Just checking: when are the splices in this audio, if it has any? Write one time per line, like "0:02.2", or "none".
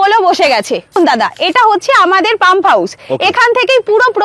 0:01.0